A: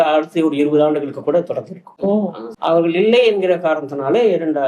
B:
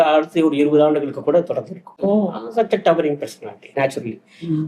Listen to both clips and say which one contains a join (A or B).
A